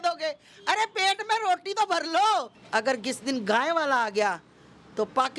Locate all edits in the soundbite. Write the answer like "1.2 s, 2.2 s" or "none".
2.6 s